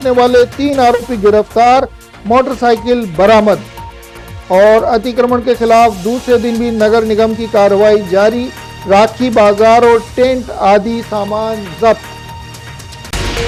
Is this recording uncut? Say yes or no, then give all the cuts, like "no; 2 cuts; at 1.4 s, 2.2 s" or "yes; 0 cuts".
yes; 0 cuts